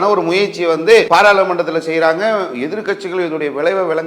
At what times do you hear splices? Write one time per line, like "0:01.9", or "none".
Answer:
0:01.1